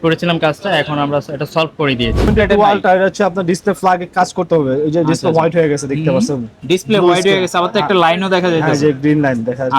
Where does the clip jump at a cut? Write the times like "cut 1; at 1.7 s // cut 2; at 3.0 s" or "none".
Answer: cut 1; at 2.3 s